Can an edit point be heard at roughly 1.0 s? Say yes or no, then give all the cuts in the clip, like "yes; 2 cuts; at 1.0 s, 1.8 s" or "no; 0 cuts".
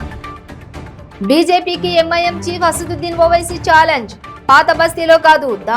yes; 1 cut; at 1.0 s